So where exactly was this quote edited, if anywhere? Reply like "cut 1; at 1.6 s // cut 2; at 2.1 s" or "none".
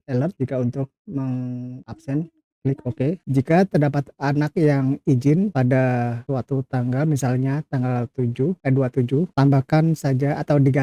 cut 1; at 3.2 s